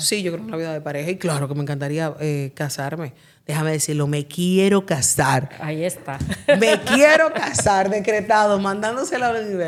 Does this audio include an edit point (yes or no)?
no